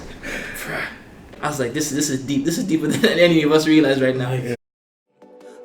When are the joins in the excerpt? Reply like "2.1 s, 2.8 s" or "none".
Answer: 4.5 s